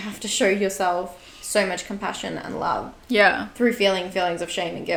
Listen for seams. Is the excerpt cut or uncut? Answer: uncut